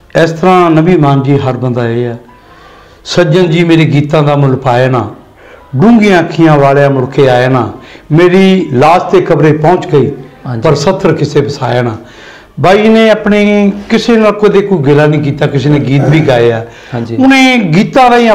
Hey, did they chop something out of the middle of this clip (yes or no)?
no